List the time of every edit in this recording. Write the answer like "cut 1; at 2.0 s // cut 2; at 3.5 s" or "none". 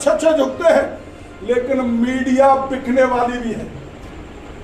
none